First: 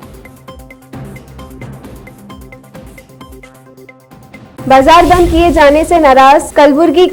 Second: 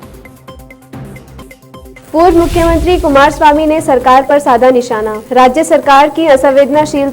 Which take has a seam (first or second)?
second